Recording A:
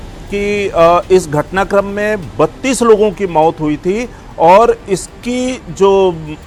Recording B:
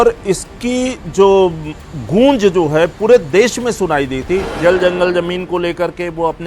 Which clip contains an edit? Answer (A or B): B